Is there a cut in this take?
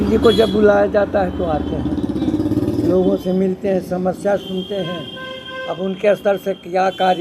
no; 0 cuts

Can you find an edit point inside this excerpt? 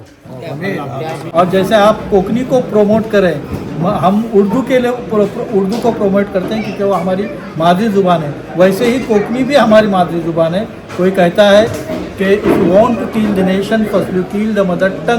yes; 1 cut; at 1.3 s

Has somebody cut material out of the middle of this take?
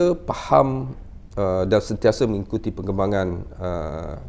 no; 0 cuts

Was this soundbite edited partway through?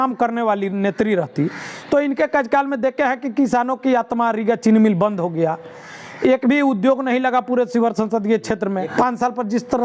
yes; 1 cut; at 8.9 s

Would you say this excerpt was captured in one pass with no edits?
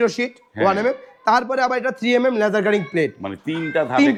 yes; 0 cuts

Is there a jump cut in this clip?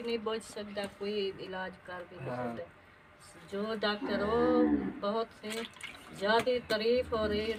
no; 0 cuts

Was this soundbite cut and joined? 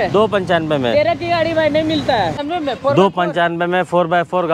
yes; 1 cut; at 2.4 s

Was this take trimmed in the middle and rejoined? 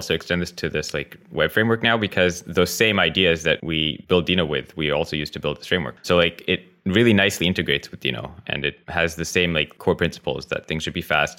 yes; 4 cuts; at 3.8 s, 5.9 s, 8.8 s, 9.7 s

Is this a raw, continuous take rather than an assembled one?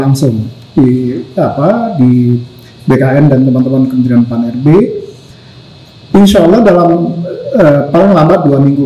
yes; 0 cuts

